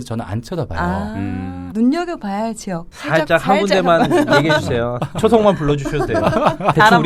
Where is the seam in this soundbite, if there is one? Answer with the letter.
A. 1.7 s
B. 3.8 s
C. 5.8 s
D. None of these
A